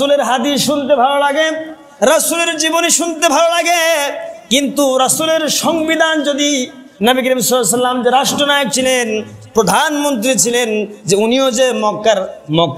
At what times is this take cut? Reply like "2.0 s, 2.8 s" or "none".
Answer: none